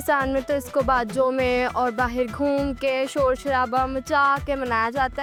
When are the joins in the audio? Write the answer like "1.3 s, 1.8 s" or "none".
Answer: none